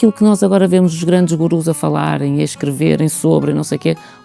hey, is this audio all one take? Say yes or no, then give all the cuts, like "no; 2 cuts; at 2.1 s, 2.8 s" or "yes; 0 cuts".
yes; 0 cuts